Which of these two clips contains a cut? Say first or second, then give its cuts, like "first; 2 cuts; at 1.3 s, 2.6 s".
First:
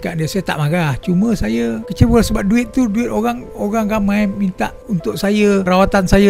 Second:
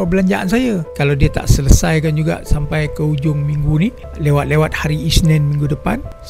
second; 1 cut; at 0.9 s